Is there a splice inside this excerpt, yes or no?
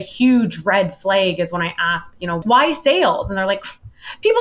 yes